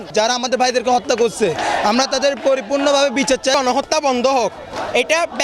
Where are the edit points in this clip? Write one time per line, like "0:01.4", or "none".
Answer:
0:03.5